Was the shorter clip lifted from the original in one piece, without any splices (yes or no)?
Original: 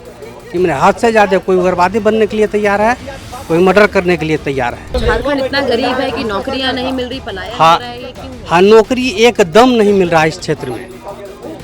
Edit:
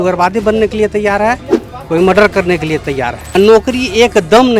no